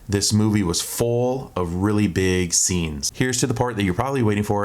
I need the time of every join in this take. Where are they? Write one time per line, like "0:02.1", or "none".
0:03.0